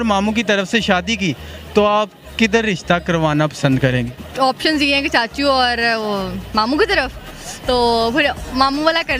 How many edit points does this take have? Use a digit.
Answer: 1